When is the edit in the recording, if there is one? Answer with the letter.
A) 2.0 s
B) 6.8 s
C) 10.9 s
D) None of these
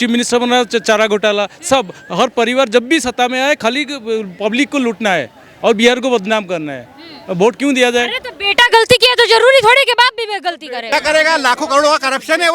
C